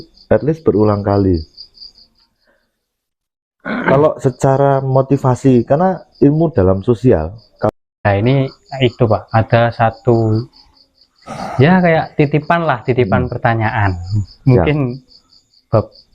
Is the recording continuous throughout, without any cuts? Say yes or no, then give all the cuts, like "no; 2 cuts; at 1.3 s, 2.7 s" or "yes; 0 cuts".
no; 1 cut; at 7.7 s